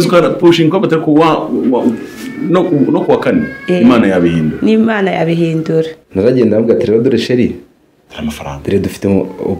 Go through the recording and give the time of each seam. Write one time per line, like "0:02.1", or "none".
0:06.0